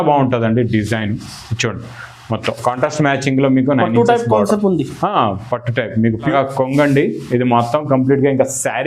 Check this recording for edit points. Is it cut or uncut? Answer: cut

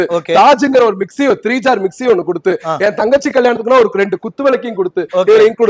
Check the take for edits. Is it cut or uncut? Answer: uncut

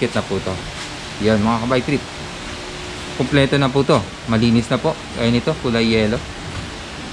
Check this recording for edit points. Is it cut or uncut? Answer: uncut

